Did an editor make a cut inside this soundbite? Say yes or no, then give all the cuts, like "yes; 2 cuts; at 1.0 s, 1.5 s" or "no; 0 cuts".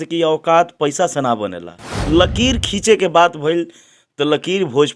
yes; 1 cut; at 1.9 s